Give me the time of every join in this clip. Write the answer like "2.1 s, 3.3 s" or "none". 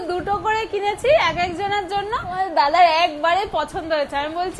2.4 s